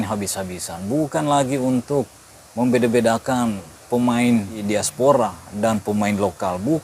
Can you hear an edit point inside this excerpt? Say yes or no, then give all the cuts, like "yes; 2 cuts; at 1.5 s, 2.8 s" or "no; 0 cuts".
yes; 1 cut; at 4.6 s